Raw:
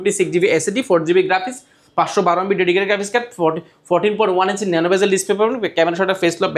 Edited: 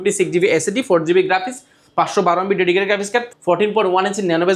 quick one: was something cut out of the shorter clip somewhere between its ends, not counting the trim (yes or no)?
yes